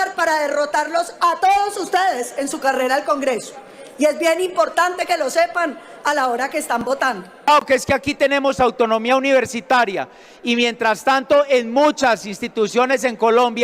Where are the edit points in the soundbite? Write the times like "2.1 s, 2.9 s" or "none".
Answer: 7.5 s